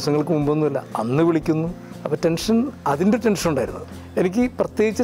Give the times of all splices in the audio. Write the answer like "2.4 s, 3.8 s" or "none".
3.9 s